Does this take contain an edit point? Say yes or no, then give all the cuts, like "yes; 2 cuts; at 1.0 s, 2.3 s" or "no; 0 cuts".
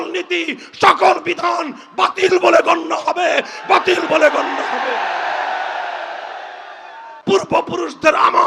yes; 1 cut; at 7.1 s